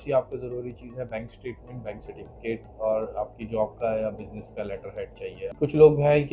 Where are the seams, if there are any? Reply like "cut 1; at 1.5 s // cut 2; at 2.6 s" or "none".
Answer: cut 1; at 5.4 s